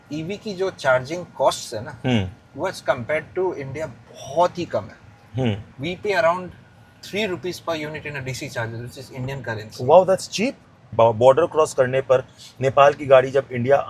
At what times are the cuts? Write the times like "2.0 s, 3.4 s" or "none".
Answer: 10.9 s